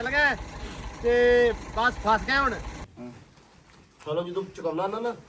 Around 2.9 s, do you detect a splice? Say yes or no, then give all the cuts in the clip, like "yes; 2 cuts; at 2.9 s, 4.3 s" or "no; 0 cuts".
yes; 1 cut; at 2.9 s